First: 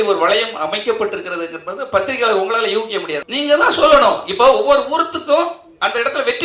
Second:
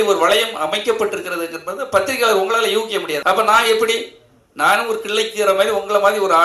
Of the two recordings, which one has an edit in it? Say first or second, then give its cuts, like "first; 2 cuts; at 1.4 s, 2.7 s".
first; 1 cut; at 3.2 s